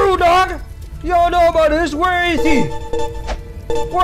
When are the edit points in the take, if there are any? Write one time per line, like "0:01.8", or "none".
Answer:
none